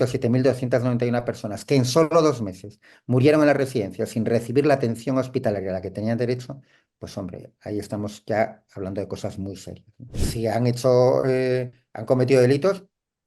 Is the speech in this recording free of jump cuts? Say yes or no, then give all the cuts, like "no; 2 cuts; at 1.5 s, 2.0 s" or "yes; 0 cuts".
no; 1 cut; at 10.2 s